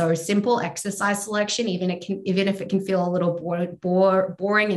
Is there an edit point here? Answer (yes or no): no